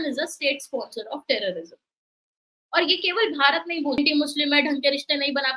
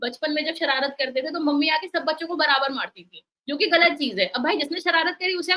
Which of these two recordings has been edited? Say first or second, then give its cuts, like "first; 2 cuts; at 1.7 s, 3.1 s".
first; 1 cut; at 4.0 s